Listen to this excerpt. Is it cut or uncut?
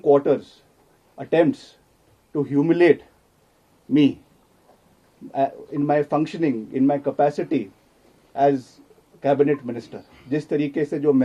uncut